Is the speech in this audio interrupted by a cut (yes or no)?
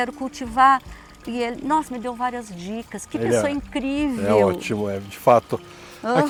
no